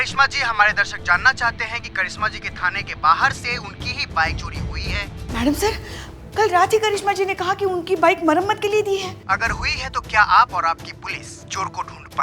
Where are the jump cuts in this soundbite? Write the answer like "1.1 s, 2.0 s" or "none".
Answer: none